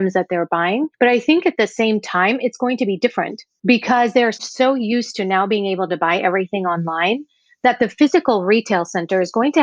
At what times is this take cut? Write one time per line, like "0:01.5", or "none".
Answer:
0:00.9
0:03.4